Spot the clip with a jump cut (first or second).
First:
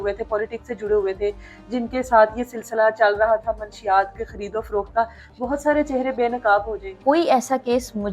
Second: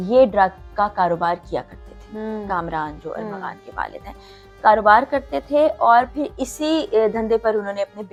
first